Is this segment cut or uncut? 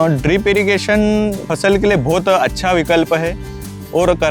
cut